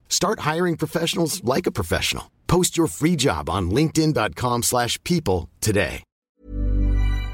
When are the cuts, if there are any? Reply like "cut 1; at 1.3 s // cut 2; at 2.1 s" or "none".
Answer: cut 1; at 6.4 s